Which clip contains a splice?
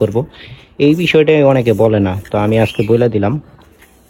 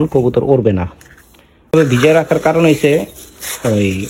second; 1 cut; at 1.7 s

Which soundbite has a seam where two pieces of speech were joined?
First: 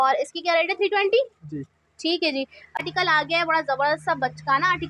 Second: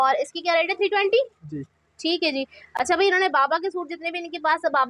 first; 1 cut; at 2.8 s

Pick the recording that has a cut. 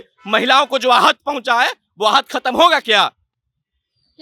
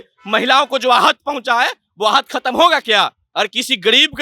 second; 1 cut; at 3.2 s

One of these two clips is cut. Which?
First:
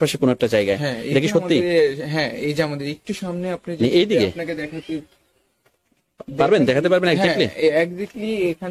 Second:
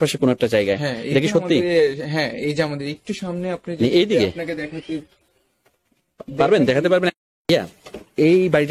second; 1 cut; at 7.1 s

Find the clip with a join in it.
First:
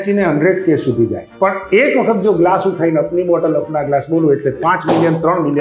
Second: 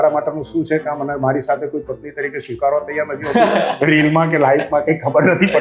first; 1 cut; at 1.2 s

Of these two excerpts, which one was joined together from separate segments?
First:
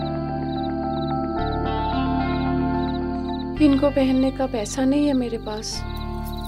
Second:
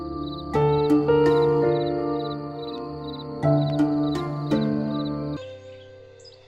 second; 1 cut; at 5.4 s

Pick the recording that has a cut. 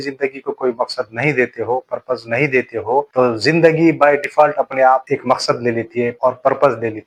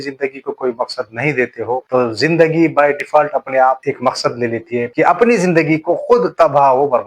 second; 2 cuts; at 1.9 s, 4.9 s

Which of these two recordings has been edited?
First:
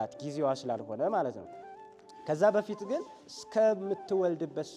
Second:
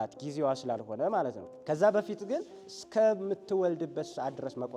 second; 1 cut; at 1.5 s

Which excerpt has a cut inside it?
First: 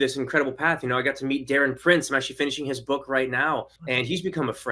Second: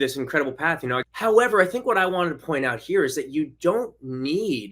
second; 1 cut; at 1.1 s

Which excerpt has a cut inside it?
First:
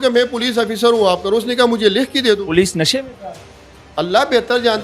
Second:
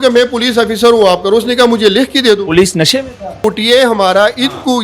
second; 1 cut; at 3.4 s

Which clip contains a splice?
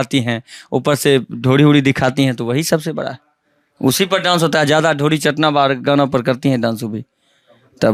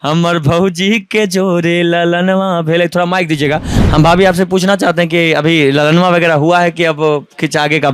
second; 1 cut; at 3.7 s

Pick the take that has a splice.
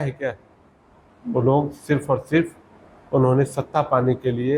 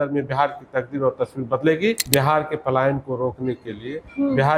second; 1 cut; at 2.0 s

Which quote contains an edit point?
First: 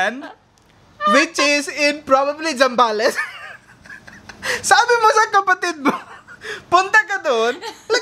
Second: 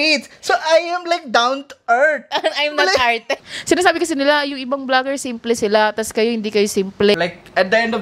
second; 2 cuts; at 3.4 s, 7.2 s

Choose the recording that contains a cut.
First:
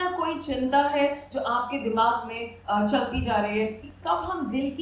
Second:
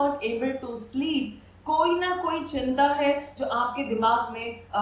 first; 1 cut; at 3.8 s

